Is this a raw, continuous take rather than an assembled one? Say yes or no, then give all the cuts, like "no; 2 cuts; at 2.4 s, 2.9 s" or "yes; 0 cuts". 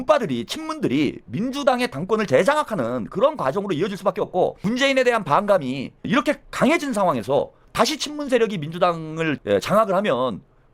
no; 3 cuts; at 4.6 s, 7.6 s, 9.3 s